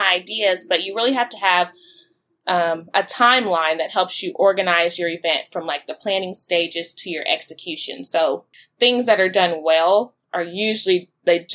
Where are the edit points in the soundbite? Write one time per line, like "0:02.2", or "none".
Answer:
0:08.5